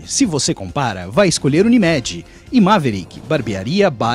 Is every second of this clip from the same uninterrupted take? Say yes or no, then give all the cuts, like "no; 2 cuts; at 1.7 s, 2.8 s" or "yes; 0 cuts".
yes; 0 cuts